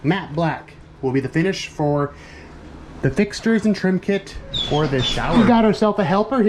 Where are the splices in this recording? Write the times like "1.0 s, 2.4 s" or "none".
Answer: 5.4 s